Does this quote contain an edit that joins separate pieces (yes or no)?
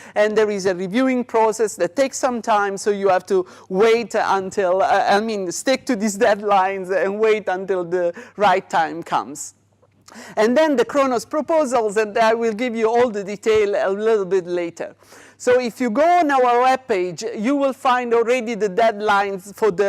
yes